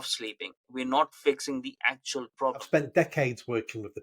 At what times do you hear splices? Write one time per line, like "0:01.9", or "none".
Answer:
0:02.6